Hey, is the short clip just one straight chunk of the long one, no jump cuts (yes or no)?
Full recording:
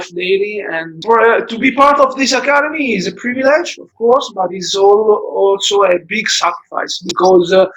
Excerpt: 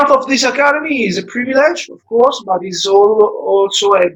yes